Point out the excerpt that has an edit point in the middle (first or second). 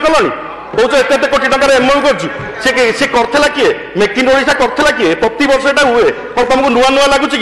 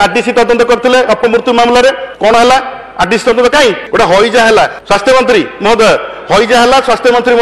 second